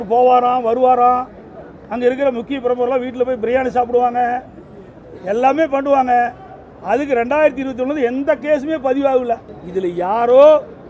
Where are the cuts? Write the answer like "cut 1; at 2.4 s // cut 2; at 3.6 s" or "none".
cut 1; at 9.5 s